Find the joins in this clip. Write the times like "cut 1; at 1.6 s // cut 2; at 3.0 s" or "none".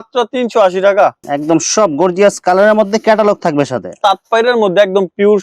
cut 1; at 1.2 s // cut 2; at 4.0 s